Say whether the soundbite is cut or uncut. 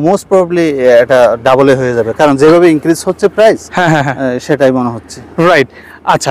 uncut